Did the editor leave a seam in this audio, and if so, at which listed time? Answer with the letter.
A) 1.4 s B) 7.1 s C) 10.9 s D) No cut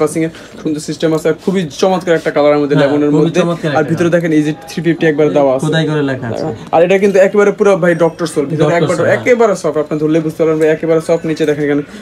D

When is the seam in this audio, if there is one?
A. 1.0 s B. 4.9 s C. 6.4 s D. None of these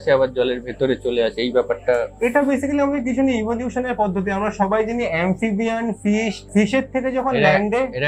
C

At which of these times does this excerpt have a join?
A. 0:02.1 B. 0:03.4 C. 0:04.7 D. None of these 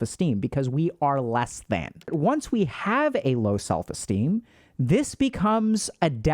A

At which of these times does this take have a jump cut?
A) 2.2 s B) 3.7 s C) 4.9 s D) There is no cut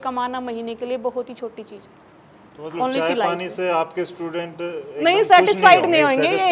D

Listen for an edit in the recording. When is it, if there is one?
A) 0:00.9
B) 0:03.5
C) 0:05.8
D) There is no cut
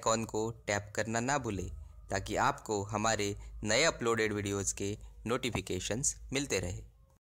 B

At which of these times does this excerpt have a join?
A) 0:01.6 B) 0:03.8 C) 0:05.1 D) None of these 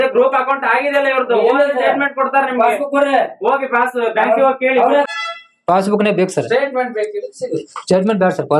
C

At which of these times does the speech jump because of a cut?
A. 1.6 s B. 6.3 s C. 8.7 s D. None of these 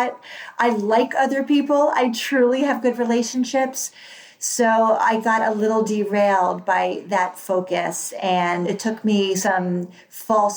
C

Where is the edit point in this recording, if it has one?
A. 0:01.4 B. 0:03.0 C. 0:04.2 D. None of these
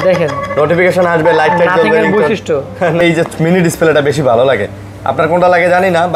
B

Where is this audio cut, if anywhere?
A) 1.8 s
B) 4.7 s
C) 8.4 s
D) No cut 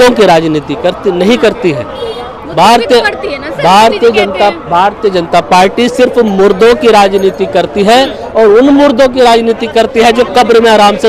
D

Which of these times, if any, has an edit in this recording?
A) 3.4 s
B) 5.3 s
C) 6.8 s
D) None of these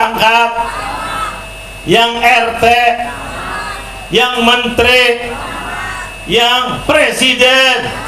C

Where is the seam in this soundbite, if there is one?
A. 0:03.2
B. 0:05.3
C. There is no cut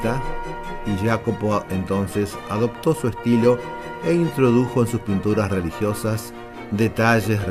B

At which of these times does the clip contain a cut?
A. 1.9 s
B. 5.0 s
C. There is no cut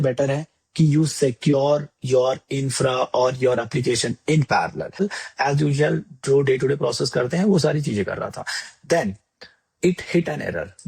B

